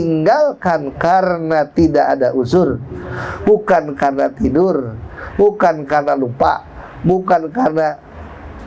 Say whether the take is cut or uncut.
uncut